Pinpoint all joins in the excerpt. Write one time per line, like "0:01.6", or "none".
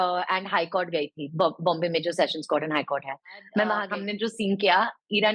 0:03.8